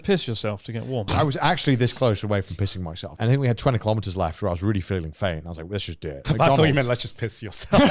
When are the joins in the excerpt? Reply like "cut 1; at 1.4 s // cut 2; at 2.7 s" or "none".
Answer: cut 1; at 1.1 s // cut 2; at 3.1 s // cut 3; at 6.2 s